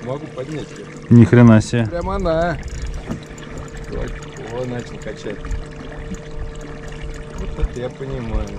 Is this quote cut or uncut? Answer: uncut